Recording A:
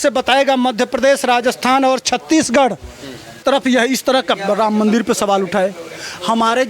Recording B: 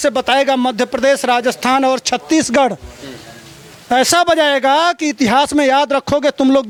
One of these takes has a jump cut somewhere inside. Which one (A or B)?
A